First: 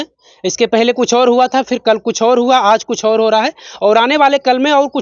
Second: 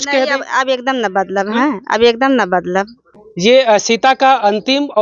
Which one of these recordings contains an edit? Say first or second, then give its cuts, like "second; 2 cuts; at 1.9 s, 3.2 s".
second; 1 cut; at 3.2 s